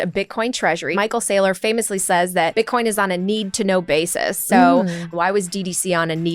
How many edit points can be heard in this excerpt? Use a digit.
2